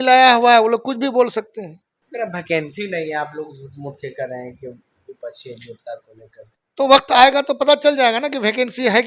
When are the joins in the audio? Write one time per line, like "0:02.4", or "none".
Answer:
none